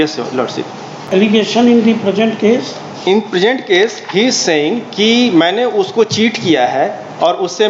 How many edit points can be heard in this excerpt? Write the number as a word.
one